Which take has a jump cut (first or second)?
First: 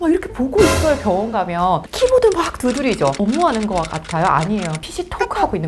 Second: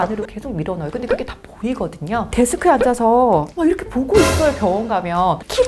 second